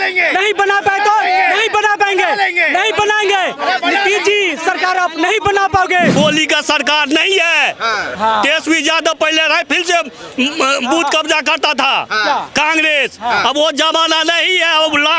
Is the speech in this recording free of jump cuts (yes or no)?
no